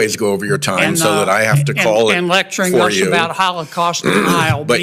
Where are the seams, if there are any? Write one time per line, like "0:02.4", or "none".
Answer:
none